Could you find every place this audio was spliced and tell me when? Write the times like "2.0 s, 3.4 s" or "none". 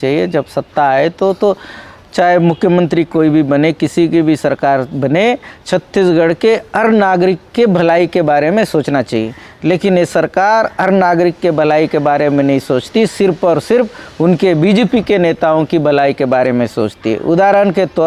none